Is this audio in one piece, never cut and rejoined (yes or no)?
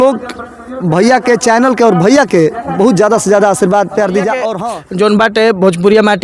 no